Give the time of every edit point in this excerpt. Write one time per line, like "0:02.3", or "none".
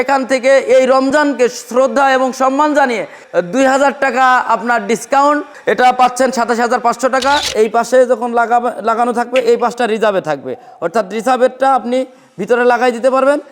0:05.5
0:07.5

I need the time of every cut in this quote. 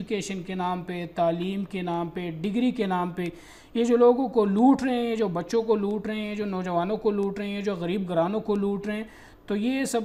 none

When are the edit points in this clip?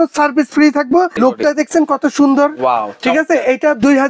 0:01.2

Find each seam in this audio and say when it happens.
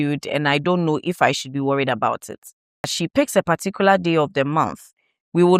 0:03.0

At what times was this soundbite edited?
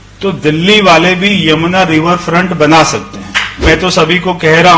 0:03.6

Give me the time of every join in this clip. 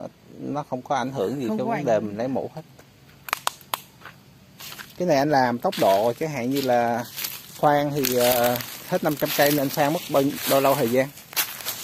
none

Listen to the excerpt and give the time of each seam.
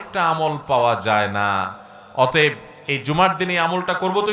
none

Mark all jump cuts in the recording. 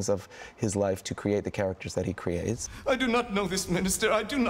0:02.7

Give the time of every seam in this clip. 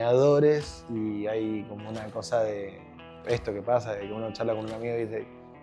none

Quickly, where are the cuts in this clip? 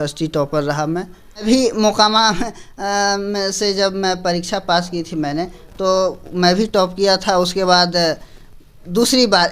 0:01.4

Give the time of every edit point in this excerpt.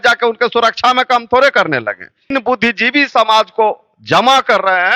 0:02.3

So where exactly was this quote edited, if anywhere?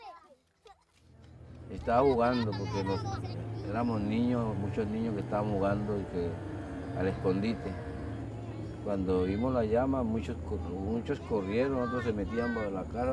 none

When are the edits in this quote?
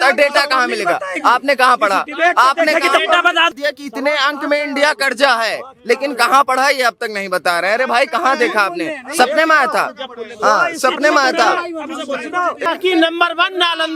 0:03.5
0:12.7

